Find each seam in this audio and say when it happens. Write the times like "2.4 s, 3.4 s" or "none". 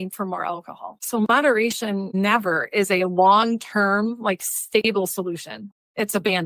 5.6 s